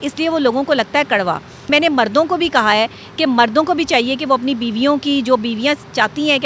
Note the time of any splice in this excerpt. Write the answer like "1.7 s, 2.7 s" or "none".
1.7 s